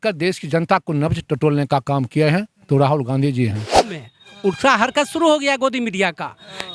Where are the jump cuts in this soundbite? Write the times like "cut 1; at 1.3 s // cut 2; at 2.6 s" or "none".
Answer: cut 1; at 4.0 s